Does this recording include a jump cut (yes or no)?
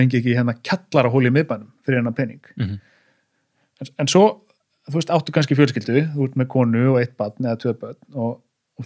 no